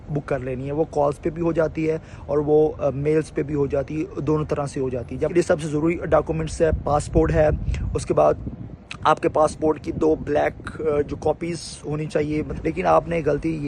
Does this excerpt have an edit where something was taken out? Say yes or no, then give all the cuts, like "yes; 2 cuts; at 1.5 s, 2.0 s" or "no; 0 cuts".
yes; 2 cuts; at 5.3 s, 12.5 s